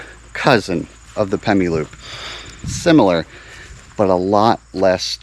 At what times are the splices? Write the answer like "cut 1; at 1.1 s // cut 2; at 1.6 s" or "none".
cut 1; at 2.7 s